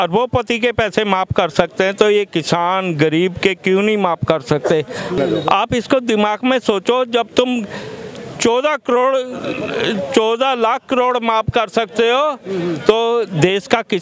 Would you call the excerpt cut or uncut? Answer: uncut